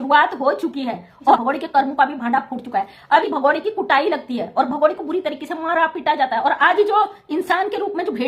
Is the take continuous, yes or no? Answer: no